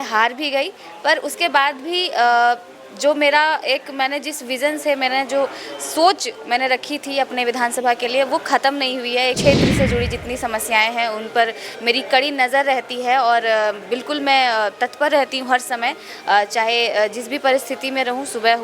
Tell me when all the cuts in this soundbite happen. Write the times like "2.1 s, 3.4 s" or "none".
9.4 s